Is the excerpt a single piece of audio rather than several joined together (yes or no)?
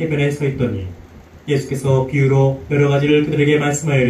yes